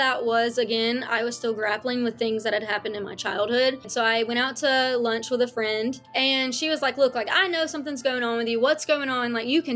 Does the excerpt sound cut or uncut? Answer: cut